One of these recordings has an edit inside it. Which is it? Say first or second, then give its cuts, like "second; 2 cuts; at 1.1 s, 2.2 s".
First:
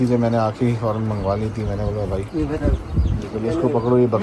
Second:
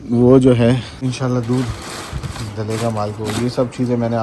second; 1 cut; at 1.0 s